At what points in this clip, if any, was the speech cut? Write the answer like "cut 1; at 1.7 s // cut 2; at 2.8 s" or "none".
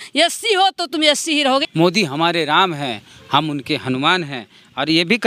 cut 1; at 1.7 s

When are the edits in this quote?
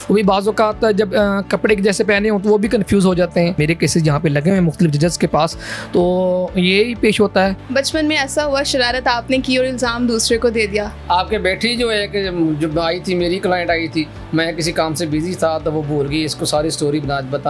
cut 1; at 3.6 s // cut 2; at 7.6 s // cut 3; at 10.9 s

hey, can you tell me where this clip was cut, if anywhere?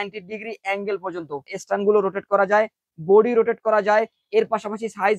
cut 1; at 1.5 s

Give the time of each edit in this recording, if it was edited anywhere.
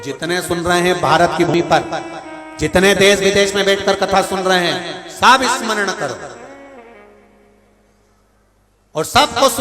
cut 1; at 1.5 s

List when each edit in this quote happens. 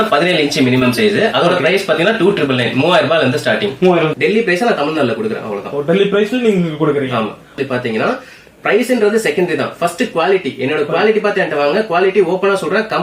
cut 1; at 4.1 s // cut 2; at 7.5 s

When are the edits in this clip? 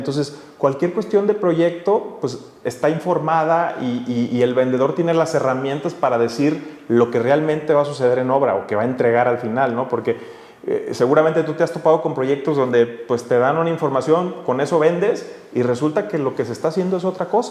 none

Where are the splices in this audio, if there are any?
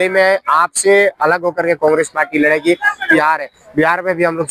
cut 1; at 3.1 s

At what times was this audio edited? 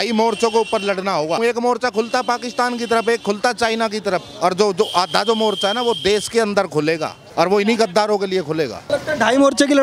cut 1; at 1.4 s // cut 2; at 7.2 s // cut 3; at 8.9 s

